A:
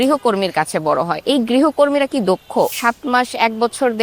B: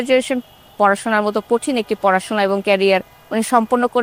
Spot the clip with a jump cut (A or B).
A